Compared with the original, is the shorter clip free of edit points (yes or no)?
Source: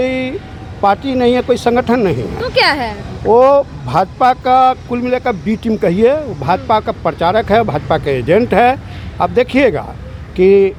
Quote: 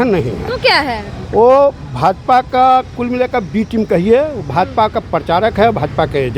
yes